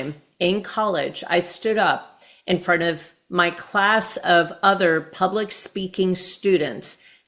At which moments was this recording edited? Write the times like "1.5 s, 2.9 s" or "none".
none